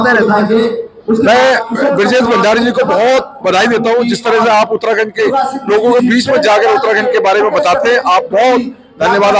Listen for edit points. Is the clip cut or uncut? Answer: uncut